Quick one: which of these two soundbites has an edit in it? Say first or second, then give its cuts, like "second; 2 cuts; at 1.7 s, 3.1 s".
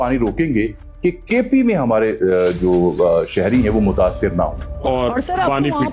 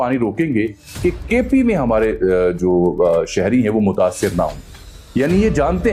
first; 1 cut; at 4.7 s